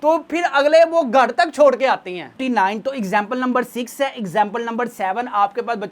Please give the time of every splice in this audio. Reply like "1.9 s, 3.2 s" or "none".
2.3 s